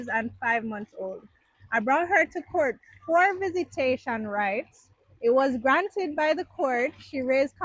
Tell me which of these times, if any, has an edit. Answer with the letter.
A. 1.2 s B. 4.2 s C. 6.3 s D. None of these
D